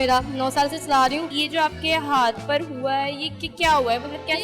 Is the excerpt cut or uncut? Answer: cut